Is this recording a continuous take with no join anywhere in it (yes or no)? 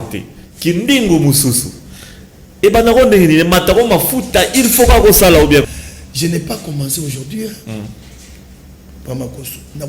no